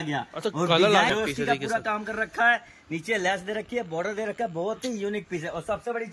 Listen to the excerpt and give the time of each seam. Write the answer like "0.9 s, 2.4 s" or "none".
1.1 s